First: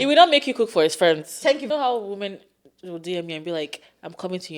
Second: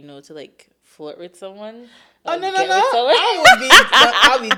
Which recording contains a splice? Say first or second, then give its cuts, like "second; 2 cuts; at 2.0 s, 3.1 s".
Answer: first; 1 cut; at 1.6 s